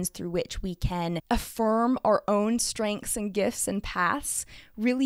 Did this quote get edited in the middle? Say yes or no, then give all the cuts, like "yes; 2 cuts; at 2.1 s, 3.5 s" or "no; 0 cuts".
yes; 1 cut; at 1.2 s